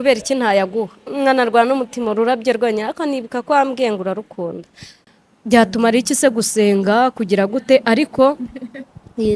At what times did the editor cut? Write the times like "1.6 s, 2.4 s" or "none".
4.9 s